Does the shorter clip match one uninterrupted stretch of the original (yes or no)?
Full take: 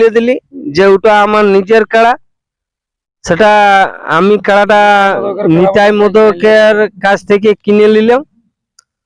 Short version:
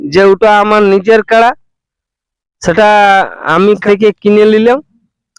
no